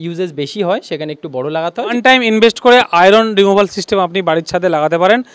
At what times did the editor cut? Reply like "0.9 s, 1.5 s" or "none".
1.9 s

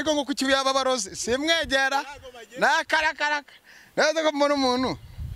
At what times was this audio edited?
none

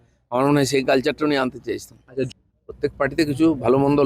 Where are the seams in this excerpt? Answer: 2.3 s

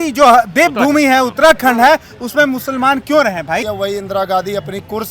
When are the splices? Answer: 3.6 s

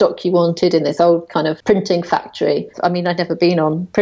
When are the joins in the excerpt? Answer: 1.6 s, 2.7 s

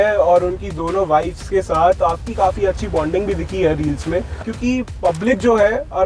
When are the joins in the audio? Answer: 4.5 s

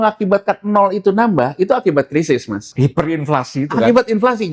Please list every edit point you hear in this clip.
2.7 s

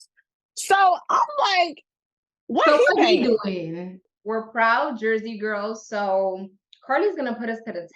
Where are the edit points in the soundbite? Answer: 4.0 s

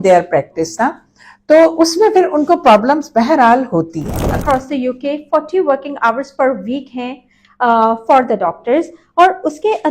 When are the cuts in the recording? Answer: 4.4 s

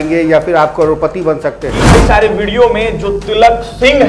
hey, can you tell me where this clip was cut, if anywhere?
1.9 s

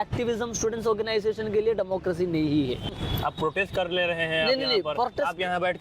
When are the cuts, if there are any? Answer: 2.9 s

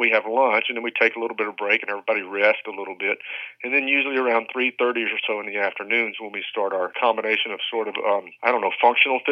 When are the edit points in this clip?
6.9 s, 8.3 s

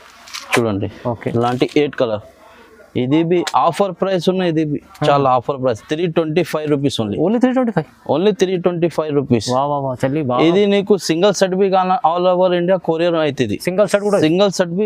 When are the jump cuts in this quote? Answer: none

